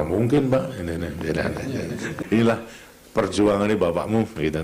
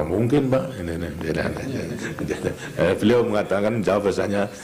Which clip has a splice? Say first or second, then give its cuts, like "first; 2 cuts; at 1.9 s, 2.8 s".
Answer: first; 1 cut; at 2.1 s